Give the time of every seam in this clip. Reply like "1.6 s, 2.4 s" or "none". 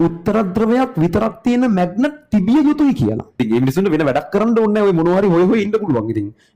3.5 s